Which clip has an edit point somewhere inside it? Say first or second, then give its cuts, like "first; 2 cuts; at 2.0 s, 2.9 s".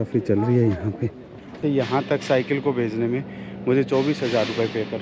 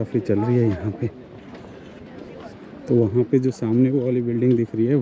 first; 1 cut; at 1.6 s